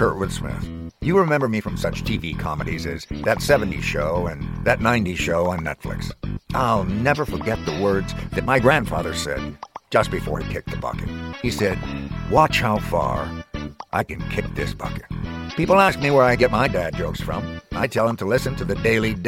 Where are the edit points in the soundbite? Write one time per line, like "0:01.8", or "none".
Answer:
none